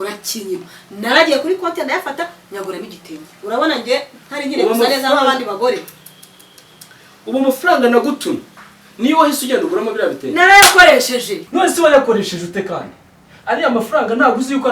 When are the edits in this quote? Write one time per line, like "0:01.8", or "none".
none